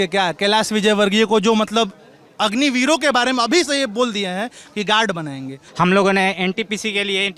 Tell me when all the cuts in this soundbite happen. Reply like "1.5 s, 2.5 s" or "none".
5.6 s